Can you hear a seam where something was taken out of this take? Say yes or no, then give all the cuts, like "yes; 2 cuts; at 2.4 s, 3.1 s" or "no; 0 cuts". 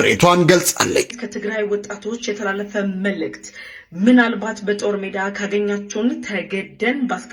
yes; 1 cut; at 1.2 s